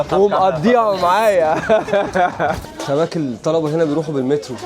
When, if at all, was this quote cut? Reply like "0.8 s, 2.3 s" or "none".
2.7 s